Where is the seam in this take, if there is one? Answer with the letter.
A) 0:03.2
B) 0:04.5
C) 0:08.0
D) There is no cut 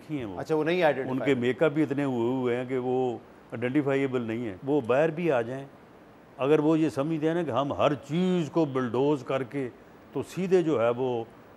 B